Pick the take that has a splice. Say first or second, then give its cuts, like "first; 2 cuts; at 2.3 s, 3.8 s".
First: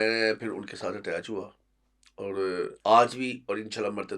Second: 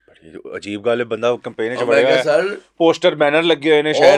first; 1 cut; at 2.7 s